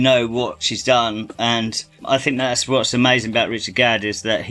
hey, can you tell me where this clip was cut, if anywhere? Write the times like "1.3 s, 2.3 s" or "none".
none